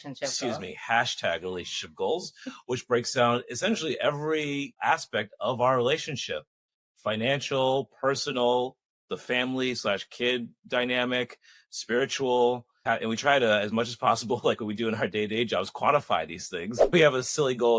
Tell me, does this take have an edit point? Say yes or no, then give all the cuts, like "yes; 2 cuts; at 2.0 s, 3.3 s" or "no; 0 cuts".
yes; 3 cuts; at 4.8 s, 12.7 s, 16.8 s